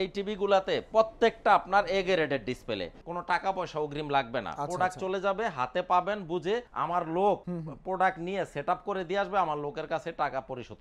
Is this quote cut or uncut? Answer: cut